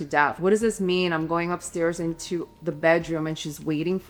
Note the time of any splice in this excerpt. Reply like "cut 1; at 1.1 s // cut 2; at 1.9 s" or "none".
none